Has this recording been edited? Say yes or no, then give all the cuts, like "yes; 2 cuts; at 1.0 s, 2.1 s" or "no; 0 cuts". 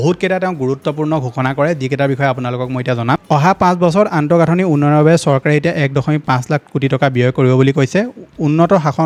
no; 0 cuts